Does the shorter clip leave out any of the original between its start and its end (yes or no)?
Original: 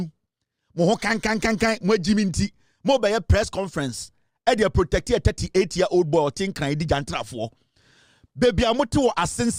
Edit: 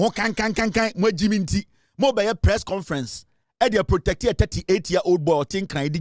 no